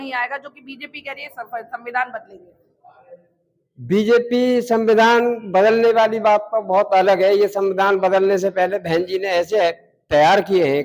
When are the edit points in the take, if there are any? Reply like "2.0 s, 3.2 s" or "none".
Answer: none